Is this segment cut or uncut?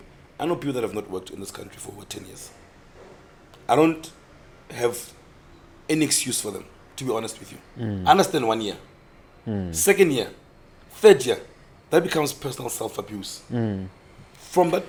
uncut